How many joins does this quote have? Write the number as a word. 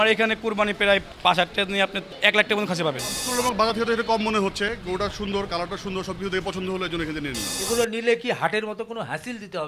four